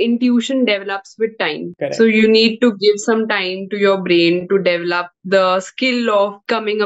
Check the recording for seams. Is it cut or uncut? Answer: uncut